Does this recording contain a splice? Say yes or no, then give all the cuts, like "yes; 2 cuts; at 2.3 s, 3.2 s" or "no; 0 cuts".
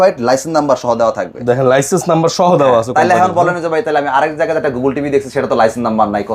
no; 0 cuts